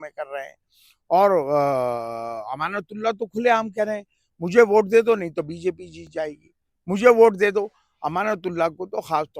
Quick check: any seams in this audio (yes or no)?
no